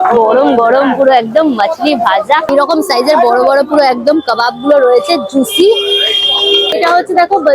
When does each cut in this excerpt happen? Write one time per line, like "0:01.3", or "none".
0:02.5
0:06.7